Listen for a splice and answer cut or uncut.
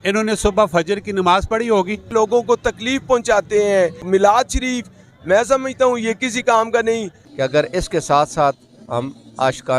cut